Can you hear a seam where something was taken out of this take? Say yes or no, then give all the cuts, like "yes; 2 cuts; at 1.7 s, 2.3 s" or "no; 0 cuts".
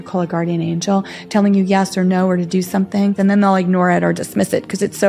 yes; 1 cut; at 3.2 s